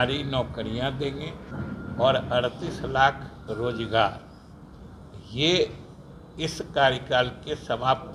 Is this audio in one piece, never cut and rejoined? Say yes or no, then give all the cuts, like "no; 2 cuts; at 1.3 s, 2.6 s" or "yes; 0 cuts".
no; 1 cut; at 1.5 s